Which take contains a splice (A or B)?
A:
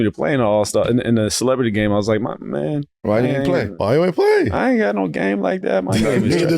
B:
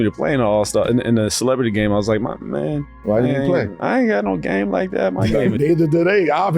B